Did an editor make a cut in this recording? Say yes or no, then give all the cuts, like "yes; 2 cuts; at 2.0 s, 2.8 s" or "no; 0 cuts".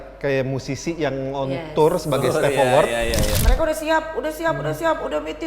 yes; 1 cut; at 3.4 s